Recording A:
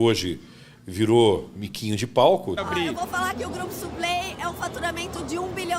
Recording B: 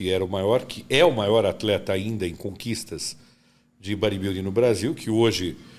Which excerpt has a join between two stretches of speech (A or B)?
A